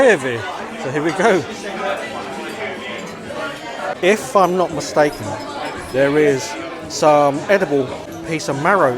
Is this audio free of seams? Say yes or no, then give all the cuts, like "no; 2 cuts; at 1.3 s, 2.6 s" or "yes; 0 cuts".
no; 2 cuts; at 3.9 s, 8.1 s